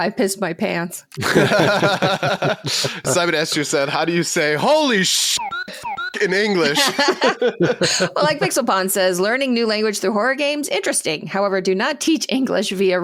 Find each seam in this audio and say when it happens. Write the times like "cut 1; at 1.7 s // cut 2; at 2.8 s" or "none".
none